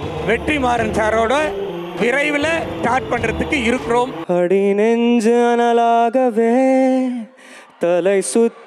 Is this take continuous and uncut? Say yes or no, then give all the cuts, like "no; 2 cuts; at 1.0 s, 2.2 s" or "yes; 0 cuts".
no; 1 cut; at 4.2 s